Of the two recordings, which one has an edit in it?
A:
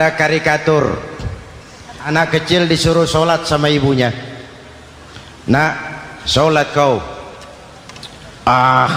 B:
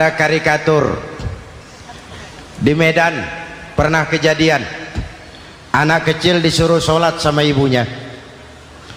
A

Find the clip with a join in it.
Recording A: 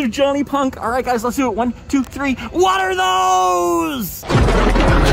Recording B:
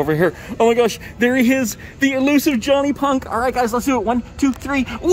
A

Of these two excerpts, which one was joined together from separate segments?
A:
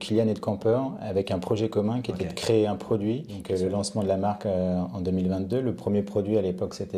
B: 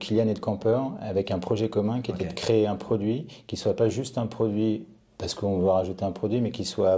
A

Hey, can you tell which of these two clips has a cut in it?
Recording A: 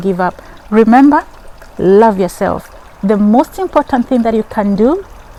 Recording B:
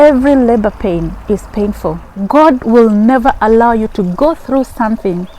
B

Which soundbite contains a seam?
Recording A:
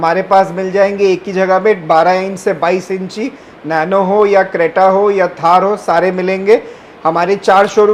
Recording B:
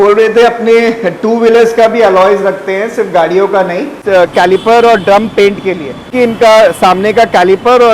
B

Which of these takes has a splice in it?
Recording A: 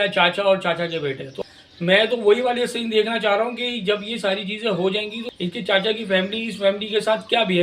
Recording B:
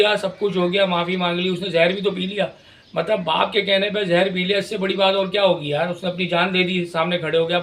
A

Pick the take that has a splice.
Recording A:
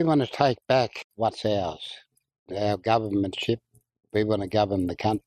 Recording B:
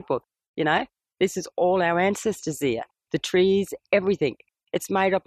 A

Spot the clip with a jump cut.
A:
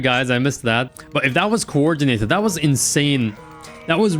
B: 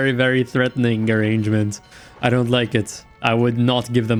A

